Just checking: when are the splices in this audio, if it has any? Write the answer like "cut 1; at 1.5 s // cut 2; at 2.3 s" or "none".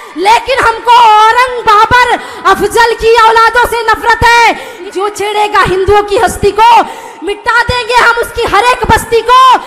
cut 1; at 4.7 s